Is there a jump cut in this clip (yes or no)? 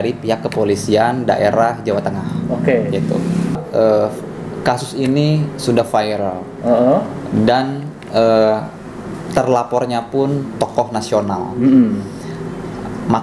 yes